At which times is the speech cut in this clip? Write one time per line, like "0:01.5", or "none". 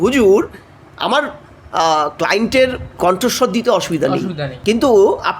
0:02.8
0:04.5